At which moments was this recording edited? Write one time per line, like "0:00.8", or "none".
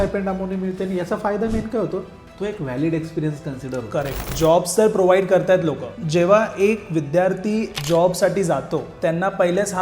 0:04.3
0:06.0
0:07.8
0:08.9